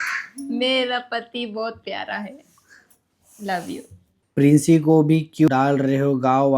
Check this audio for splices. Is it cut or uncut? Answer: cut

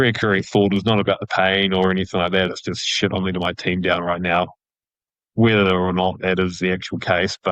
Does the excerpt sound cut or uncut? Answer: uncut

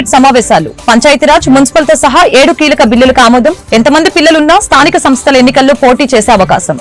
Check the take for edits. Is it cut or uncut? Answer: uncut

